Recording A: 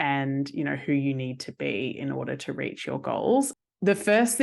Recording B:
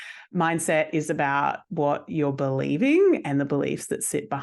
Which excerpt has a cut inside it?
A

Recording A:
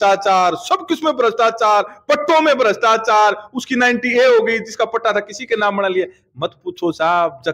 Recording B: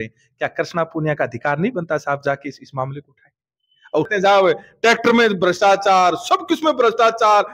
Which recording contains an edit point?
B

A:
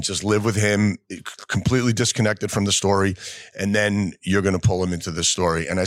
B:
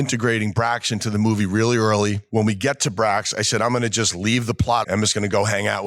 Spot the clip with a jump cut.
B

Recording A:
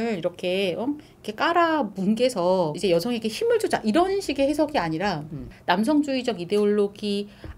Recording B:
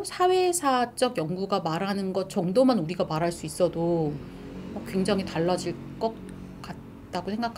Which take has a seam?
A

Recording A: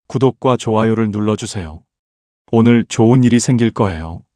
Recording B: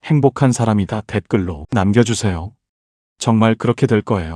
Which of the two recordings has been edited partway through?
B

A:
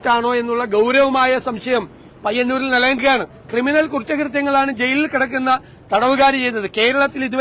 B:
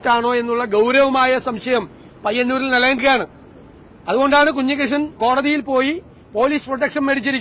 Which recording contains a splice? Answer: A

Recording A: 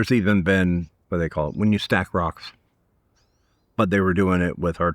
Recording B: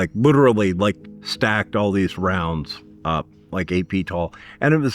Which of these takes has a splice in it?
A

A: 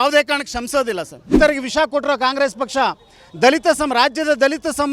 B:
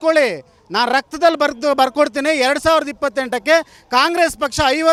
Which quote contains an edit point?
A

